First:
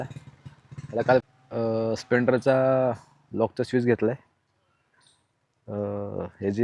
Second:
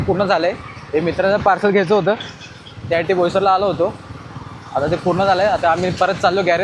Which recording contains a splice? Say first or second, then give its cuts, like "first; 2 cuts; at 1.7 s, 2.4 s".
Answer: first; 1 cut; at 1.3 s